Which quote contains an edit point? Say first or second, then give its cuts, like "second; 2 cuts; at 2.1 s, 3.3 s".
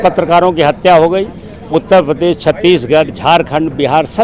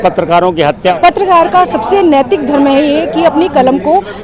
second; 1 cut; at 0.9 s